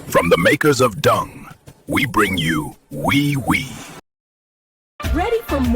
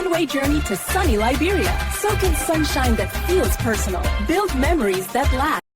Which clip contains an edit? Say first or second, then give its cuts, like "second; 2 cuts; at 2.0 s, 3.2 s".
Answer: first; 1 cut; at 4.7 s